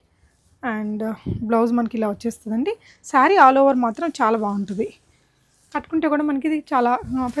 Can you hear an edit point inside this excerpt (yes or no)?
no